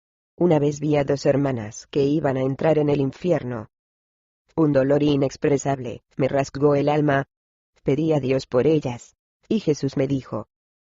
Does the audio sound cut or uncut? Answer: cut